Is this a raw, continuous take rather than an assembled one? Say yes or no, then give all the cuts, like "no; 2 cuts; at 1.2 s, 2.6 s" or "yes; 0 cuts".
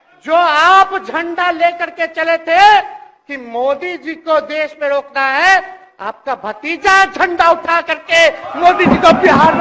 yes; 0 cuts